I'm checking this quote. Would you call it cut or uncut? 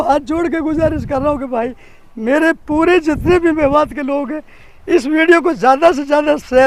uncut